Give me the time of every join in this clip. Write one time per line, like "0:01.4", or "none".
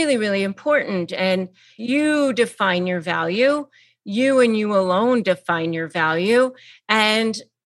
0:01.6